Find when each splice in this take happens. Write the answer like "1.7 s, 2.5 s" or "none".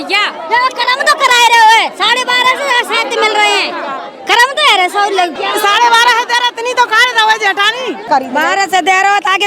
5.4 s, 8.0 s

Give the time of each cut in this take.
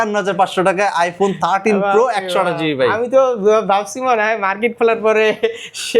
none

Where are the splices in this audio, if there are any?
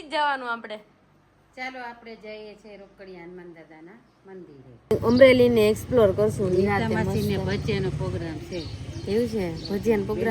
4.9 s

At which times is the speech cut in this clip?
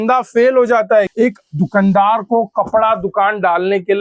1.1 s

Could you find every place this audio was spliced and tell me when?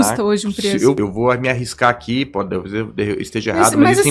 1.0 s

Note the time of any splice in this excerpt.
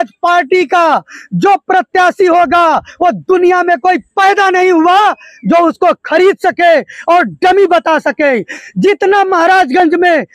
none

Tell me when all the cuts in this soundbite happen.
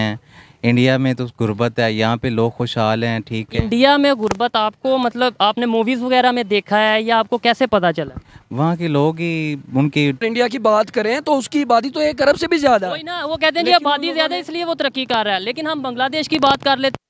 10.2 s

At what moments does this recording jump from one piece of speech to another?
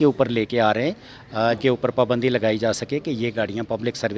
1.6 s

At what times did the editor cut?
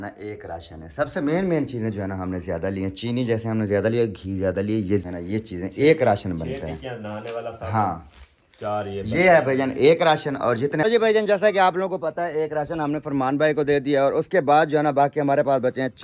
5.0 s, 10.6 s

